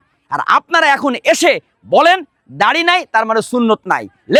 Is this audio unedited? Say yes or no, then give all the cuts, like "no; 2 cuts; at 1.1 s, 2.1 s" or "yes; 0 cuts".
yes; 0 cuts